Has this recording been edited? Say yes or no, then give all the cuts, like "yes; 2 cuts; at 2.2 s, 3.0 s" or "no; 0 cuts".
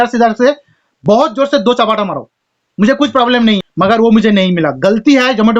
yes; 1 cut; at 3.6 s